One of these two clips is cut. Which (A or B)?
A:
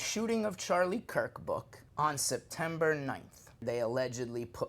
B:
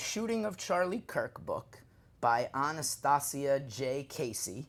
A